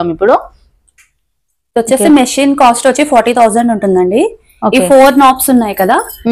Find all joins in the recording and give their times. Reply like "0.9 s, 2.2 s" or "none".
none